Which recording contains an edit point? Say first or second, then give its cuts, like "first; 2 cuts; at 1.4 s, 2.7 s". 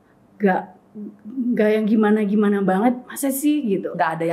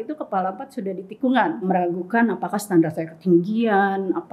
second; 1 cut; at 1.7 s